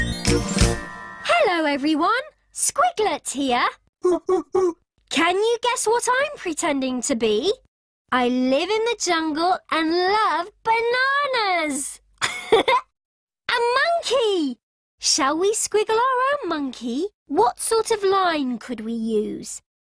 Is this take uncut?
no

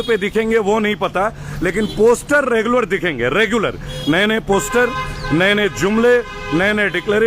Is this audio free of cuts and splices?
yes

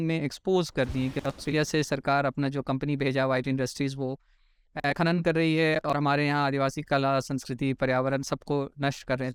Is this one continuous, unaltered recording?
yes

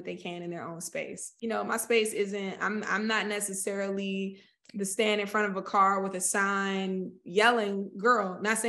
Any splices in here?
yes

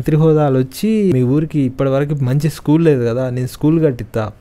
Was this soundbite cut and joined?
yes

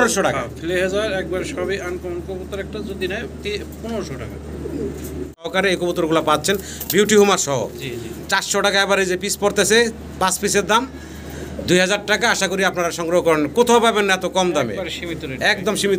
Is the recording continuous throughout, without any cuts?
no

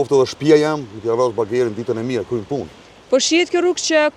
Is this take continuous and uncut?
yes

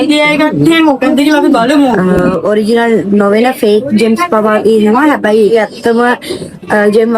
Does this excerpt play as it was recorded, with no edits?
no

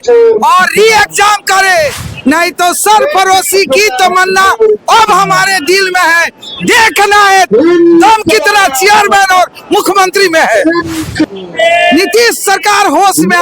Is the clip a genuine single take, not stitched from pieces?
no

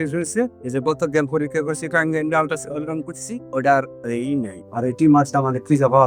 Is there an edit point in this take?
no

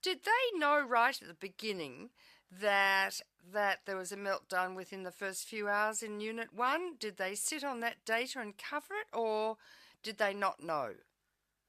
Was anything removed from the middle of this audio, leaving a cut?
yes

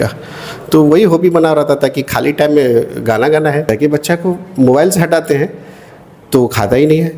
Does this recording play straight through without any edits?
no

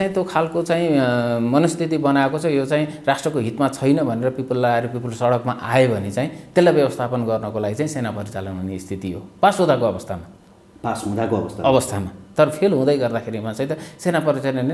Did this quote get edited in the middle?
no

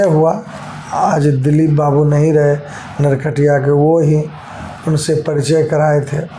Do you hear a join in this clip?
no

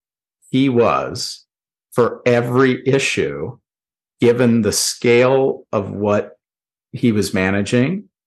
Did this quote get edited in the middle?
no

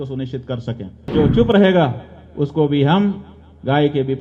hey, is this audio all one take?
no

